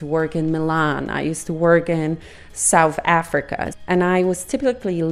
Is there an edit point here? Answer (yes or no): yes